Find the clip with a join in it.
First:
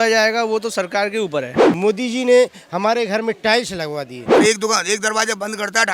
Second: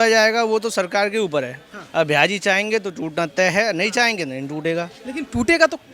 first; 2 cuts; at 1.6 s, 4.2 s

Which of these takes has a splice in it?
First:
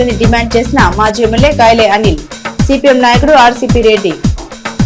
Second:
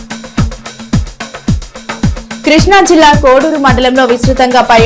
second; 1 cut; at 1.0 s

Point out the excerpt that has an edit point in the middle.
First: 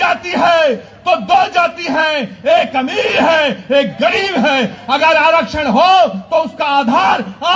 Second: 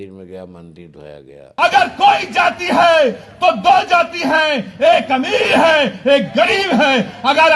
second; 1 cut; at 1.4 s

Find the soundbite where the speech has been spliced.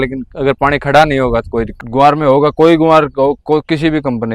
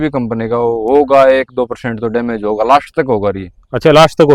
first; 1 cut; at 1.8 s

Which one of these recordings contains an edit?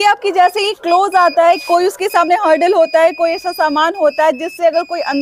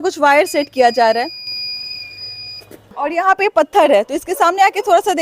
second; 1 cut; at 2.9 s

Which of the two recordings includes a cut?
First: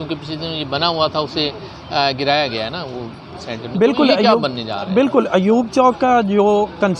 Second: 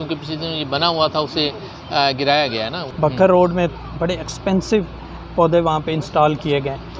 second; 1 cut; at 2.8 s

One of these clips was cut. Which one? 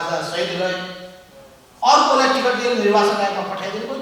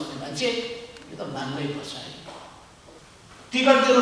second; 1 cut; at 3.0 s

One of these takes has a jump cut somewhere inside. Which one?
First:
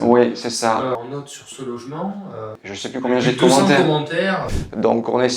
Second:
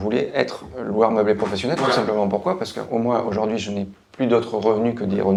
first; 3 cuts; at 1.0 s, 2.6 s, 4.4 s

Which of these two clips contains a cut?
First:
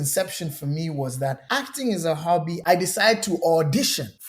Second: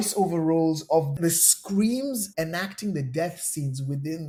first; 1 cut; at 2.5 s

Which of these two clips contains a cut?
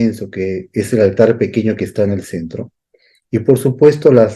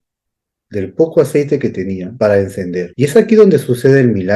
second; 2 cuts; at 2.1 s, 2.9 s

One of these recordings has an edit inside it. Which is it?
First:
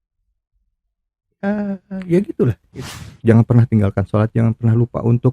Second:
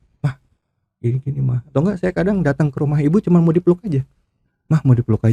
first; 1 cut; at 3.1 s

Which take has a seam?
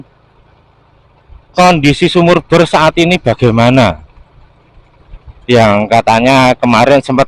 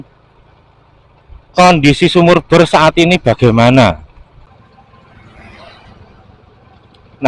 second; 1 cut; at 4.5 s

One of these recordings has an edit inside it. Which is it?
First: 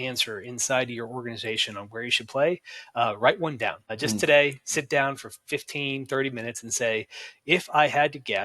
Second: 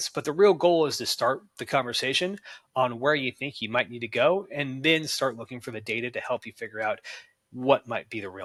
first; 1 cut; at 3.9 s

